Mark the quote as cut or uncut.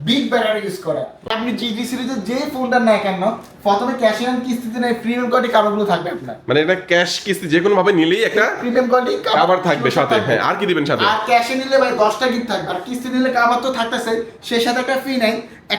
cut